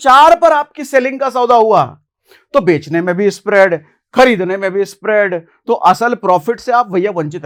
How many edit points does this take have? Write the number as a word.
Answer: zero